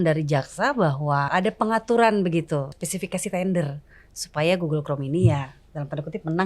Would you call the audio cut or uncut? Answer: cut